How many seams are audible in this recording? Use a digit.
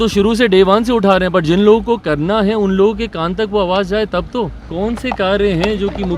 1